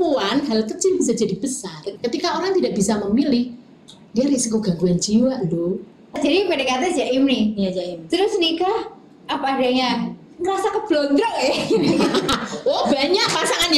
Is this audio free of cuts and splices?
no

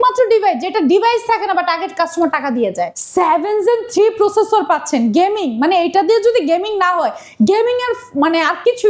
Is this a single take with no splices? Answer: no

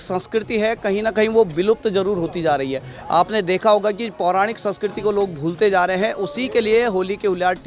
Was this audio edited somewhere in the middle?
no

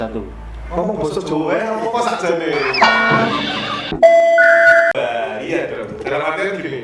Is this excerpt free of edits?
no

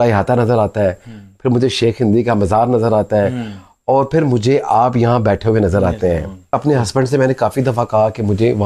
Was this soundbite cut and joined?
yes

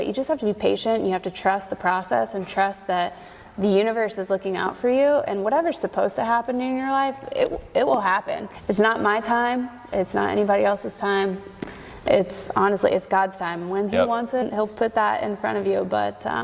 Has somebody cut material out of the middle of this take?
yes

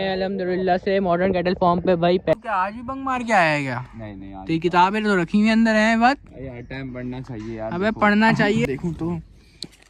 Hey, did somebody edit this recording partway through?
yes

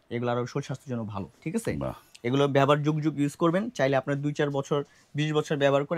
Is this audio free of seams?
yes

